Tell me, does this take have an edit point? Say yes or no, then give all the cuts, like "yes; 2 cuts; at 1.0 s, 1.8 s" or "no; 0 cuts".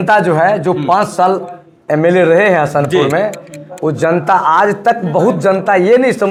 no; 0 cuts